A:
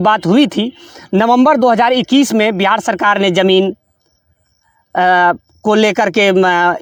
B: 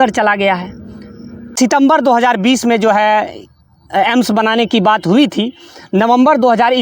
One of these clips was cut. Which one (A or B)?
B